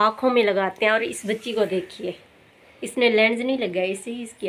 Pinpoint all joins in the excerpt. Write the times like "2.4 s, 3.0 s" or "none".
none